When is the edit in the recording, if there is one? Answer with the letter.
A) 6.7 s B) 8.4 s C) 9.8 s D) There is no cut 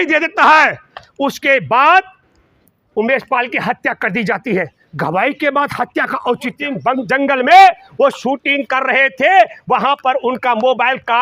A